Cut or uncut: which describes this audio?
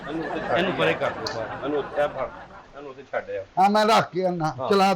uncut